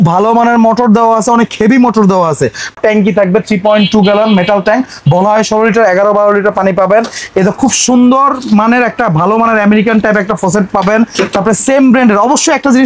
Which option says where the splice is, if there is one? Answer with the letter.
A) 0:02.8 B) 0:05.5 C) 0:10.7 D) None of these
A